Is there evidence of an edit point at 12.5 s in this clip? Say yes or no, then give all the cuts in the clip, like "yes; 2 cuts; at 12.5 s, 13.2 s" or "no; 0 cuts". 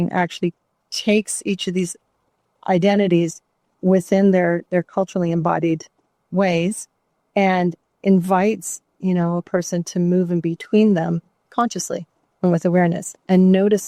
no; 0 cuts